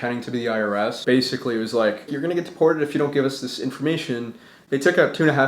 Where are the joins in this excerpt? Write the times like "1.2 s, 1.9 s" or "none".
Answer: 1.0 s, 2.2 s

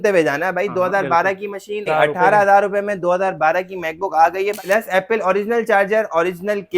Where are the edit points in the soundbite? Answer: 1.9 s, 4.6 s

